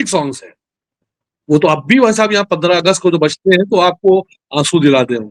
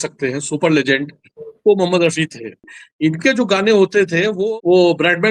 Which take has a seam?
second; 2 cuts; at 2.8 s, 4.4 s

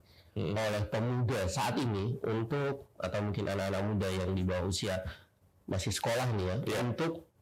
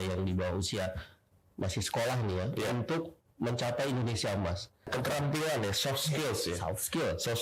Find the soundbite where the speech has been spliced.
second; 1 cut; at 4.9 s

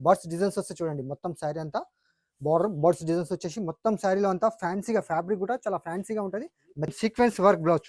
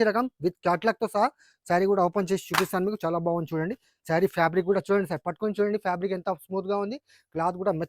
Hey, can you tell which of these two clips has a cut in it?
first; 1 cut; at 6.9 s

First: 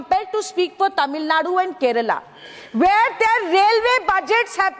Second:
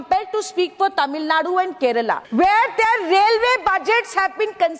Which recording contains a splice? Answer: second; 1 cut; at 2.2 s

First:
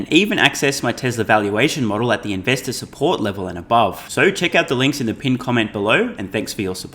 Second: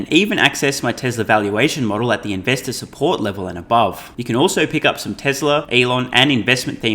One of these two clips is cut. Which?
second; 2 cuts; at 4.1 s, 5.7 s

